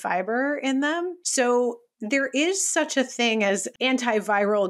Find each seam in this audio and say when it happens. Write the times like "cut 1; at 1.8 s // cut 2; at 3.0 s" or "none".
cut 1; at 1.2 s // cut 2; at 3.7 s